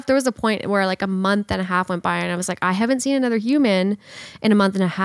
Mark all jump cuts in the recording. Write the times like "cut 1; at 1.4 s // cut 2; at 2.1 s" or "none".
none